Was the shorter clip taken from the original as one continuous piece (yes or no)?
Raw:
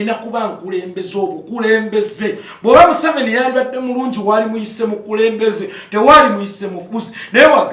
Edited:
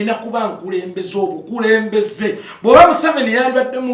yes